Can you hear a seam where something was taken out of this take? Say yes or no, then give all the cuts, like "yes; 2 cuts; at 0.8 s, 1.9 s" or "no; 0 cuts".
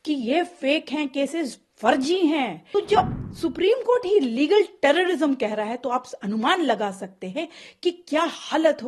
yes; 1 cut; at 2.6 s